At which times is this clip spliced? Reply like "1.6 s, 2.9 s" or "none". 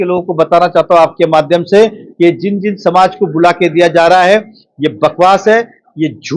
none